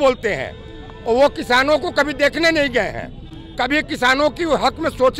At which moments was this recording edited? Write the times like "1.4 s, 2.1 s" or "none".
none